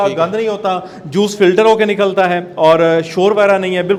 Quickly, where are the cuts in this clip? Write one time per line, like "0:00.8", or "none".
none